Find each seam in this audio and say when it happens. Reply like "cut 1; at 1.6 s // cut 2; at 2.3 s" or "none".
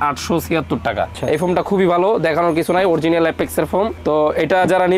cut 1; at 1.1 s